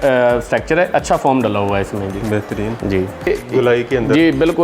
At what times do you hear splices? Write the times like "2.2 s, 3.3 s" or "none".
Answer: 3.3 s